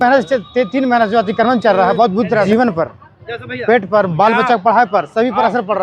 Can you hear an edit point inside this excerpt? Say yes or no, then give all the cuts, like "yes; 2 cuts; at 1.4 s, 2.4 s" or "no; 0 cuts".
yes; 1 cut; at 2.5 s